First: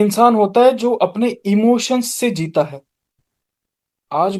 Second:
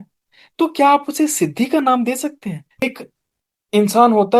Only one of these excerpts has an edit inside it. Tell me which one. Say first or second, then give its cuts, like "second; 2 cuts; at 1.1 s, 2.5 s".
second; 1 cut; at 2.8 s